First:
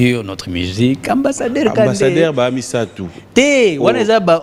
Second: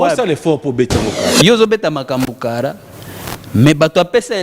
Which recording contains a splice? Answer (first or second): second